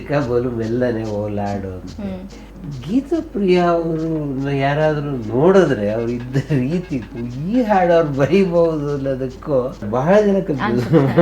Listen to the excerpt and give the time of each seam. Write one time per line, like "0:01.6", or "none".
0:02.5
0:09.9